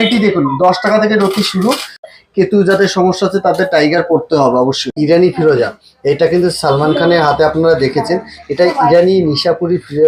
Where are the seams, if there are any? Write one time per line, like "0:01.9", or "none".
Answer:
0:02.1
0:04.9

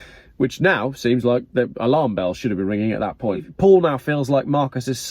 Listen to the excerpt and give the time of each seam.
0:03.5

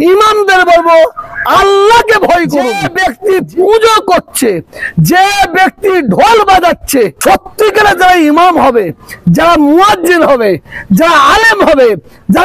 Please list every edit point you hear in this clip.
0:02.9
0:07.1

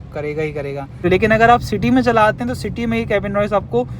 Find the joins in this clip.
0:01.0

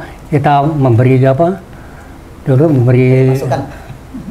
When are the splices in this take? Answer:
none

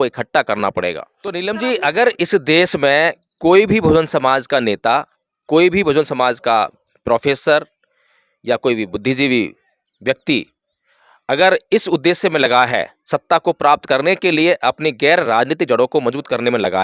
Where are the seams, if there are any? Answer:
0:01.4

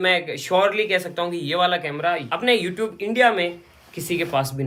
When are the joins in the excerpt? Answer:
none

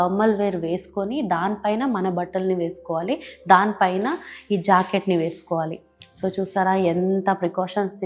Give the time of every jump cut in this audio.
none

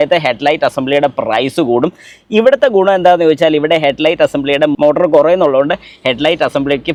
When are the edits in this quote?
none

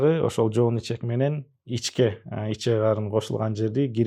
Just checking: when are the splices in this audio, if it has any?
none

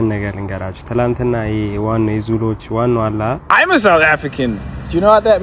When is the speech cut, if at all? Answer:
0:03.4

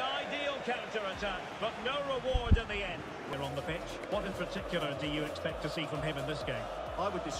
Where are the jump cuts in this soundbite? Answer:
0:03.4

